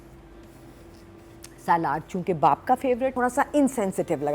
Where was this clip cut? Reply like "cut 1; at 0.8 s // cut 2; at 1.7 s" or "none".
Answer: cut 1; at 3.1 s